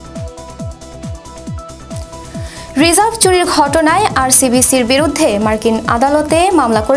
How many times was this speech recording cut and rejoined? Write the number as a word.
one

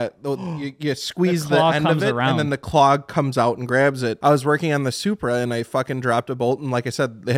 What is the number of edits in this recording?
one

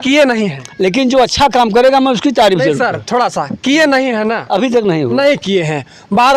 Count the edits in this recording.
zero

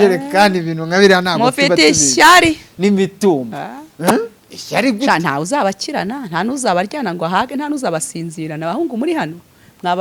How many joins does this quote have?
zero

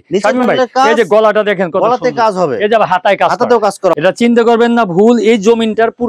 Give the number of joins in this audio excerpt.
one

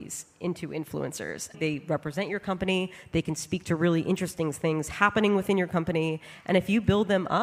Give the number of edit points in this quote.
one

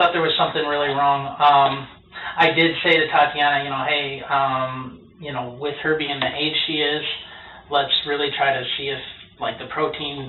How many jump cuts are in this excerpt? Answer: zero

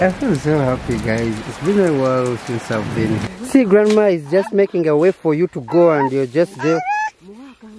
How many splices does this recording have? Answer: one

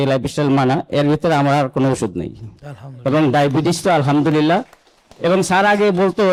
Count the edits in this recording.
zero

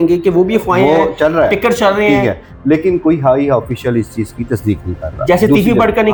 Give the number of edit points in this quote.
zero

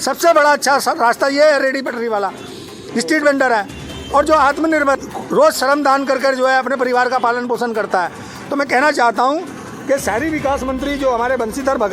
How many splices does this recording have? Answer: one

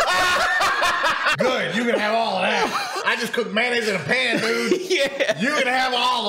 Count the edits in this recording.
two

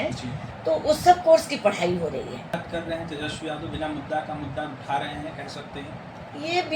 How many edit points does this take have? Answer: one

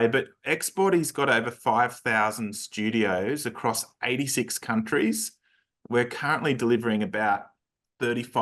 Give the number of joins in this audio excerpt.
zero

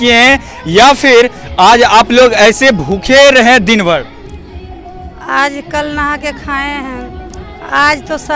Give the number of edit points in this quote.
zero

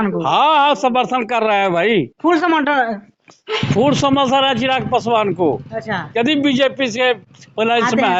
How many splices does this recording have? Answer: zero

